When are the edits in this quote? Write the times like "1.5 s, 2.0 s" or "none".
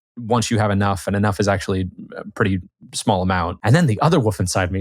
3.5 s